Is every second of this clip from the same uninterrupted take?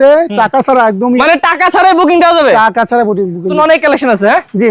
no; 2 cuts; at 1.2 s, 3.6 s

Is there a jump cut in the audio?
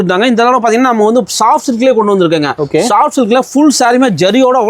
no; 0 cuts

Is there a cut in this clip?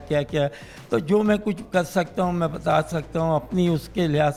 no; 0 cuts

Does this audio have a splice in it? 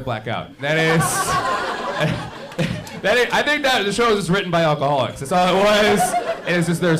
no; 0 cuts

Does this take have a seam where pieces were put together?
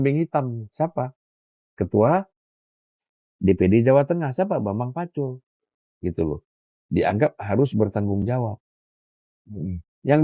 no; 0 cuts

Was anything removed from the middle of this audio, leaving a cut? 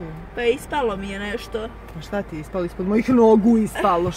no; 0 cuts

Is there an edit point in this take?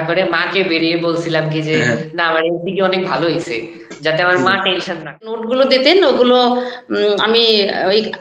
yes; 1 cut; at 5.4 s

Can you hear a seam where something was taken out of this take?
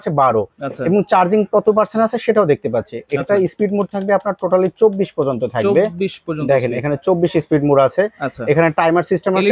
no; 0 cuts

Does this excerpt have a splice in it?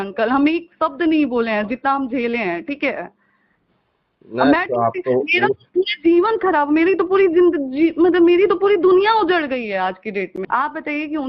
yes; 1 cut; at 10.4 s

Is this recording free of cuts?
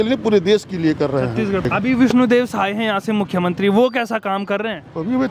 no; 1 cut; at 1.6 s

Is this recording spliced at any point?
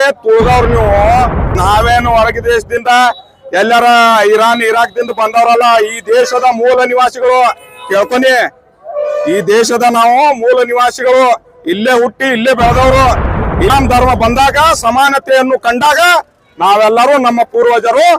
yes; 2 cuts; at 1.6 s, 13.7 s

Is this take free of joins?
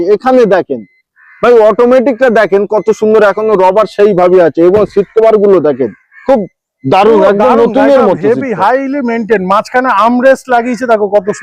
yes; 0 cuts

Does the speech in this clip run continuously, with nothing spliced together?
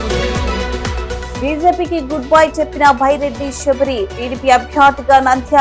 no; 1 cut; at 1.0 s

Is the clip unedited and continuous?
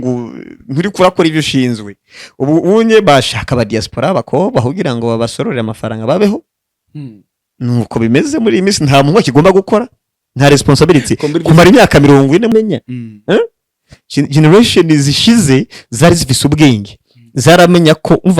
no; 1 cut; at 12.5 s

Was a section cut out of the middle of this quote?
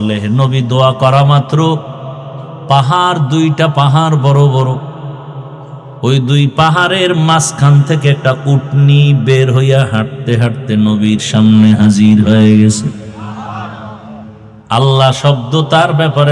yes; 1 cut; at 14.5 s

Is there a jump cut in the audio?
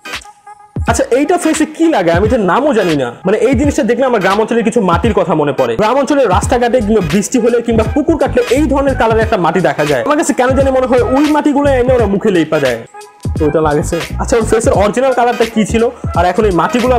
no; 0 cuts

